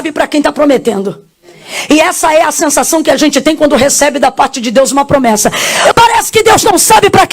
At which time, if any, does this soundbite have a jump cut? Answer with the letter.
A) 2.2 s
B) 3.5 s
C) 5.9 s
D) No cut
C